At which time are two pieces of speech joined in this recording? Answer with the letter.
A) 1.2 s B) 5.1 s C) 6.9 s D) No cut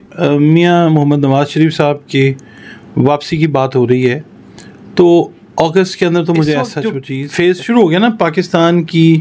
C